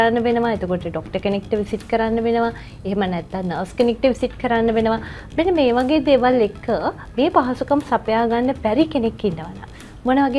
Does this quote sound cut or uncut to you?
uncut